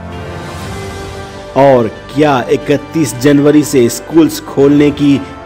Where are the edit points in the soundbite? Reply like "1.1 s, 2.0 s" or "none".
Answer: 1.2 s